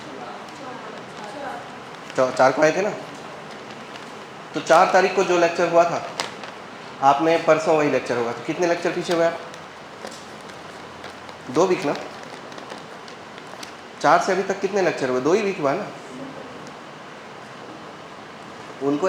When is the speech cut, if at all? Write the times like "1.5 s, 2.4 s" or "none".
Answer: 17.6 s